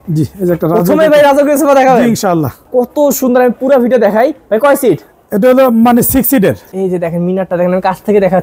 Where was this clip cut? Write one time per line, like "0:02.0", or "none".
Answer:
0:02.6
0:06.7